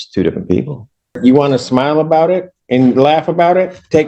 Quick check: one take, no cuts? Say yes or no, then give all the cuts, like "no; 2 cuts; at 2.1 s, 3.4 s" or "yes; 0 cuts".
no; 1 cut; at 1.1 s